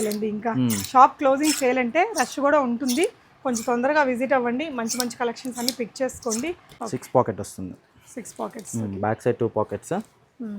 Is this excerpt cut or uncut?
cut